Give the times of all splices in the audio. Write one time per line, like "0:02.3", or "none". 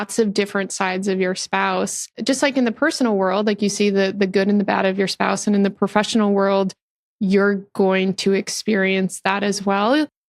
0:02.2